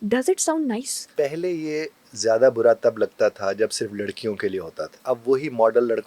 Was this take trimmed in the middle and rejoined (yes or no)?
yes